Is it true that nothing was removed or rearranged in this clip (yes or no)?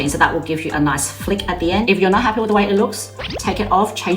no